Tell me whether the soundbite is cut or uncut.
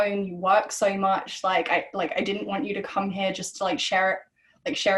uncut